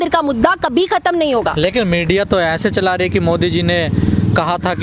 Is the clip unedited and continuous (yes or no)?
yes